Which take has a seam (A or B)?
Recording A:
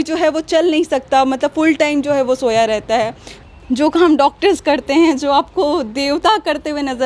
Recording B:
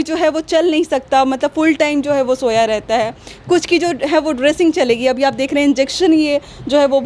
A